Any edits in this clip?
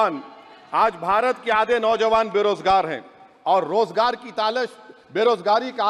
no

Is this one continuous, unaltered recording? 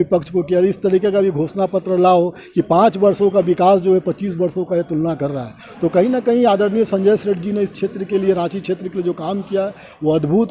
yes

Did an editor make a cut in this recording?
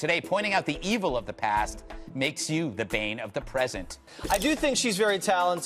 yes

